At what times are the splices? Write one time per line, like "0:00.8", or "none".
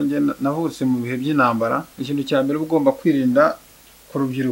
0:01.9